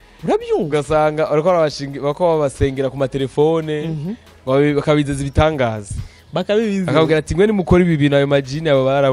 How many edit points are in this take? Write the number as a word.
zero